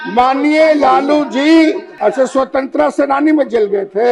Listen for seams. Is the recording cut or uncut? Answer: cut